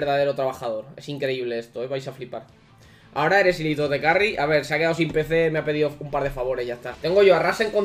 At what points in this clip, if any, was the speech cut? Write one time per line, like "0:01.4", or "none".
0:06.9